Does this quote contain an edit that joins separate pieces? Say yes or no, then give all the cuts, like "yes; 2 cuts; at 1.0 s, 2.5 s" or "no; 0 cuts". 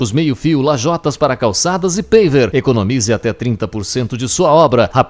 no; 0 cuts